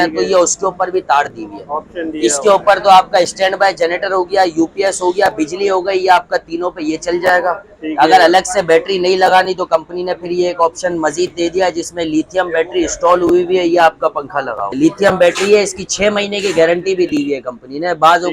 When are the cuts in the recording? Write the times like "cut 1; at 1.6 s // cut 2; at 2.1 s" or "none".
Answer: cut 1; at 14.7 s

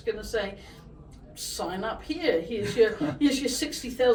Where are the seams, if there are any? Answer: none

